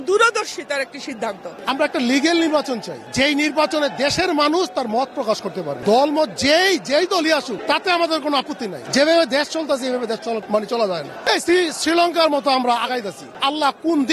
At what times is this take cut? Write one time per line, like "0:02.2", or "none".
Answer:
0:01.6
0:03.0
0:05.7
0:07.5
0:08.8
0:10.4
0:11.1
0:13.3

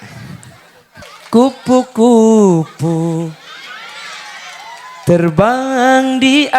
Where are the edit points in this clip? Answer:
0:01.0

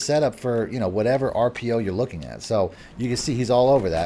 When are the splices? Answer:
0:02.8

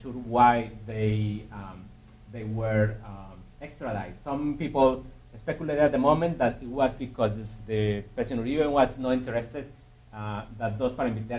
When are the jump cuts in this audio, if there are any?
none

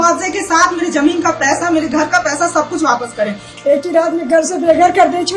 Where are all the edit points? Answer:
0:03.4

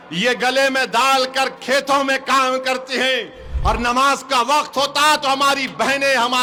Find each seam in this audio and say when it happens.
none

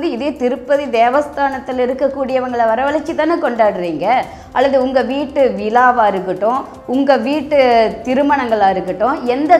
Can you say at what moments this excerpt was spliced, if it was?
none

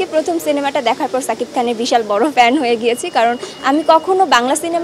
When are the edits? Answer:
none

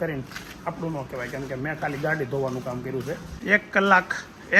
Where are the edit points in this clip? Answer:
0:03.3

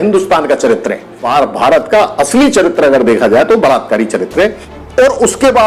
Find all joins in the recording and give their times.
0:01.2
0:04.7

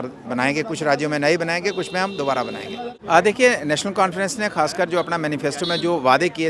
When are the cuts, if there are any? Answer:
0:02.9

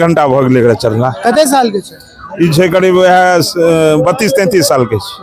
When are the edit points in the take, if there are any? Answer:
none

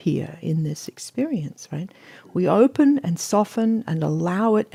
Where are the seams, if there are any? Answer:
none

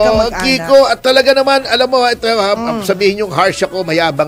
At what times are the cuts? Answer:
none

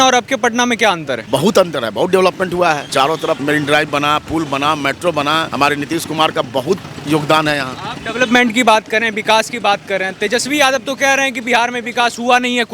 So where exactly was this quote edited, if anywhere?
0:01.1
0:03.3
0:05.5

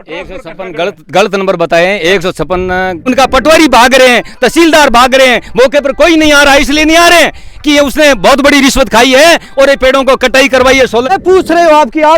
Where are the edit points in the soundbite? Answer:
0:03.0
0:11.1

